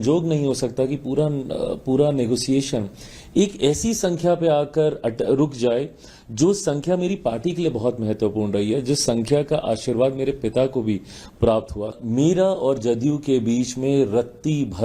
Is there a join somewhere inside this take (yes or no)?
yes